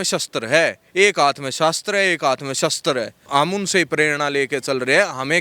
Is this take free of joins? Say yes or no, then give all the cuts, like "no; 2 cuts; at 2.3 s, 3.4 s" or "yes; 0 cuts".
no; 1 cut; at 3.3 s